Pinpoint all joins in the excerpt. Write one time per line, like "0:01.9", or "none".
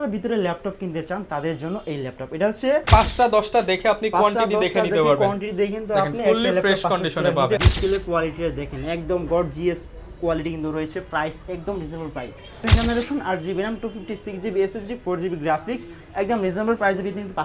0:02.8
0:07.6
0:12.6